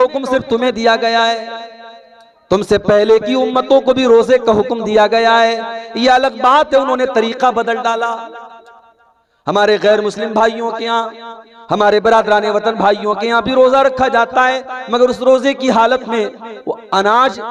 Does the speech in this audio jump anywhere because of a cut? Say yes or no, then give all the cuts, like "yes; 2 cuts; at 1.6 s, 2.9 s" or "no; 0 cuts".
no; 0 cuts